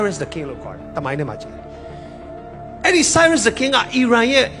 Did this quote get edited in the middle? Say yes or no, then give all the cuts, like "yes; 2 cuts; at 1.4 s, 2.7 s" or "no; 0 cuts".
no; 0 cuts